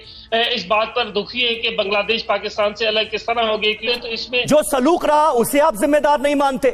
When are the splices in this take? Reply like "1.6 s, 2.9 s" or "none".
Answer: 3.9 s